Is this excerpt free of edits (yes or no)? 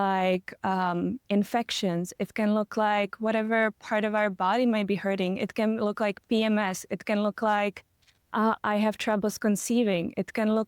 yes